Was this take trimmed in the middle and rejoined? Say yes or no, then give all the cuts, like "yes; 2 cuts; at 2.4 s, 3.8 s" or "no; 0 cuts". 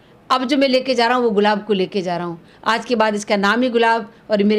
no; 0 cuts